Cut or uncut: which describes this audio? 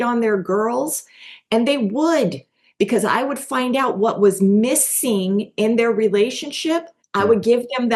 cut